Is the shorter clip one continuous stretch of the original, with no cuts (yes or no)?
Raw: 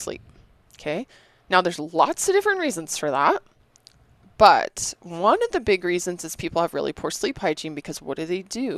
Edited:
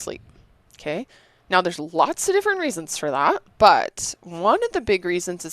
no